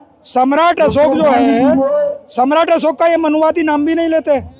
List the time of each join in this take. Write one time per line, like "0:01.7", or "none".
none